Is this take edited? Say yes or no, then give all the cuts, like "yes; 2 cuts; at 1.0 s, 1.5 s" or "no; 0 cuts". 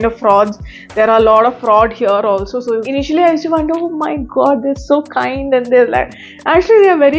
yes; 1 cut; at 2.9 s